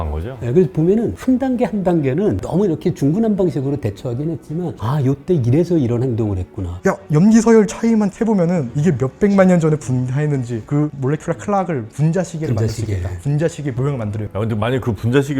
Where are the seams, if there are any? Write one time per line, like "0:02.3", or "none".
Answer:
0:06.7
0:10.6
0:14.2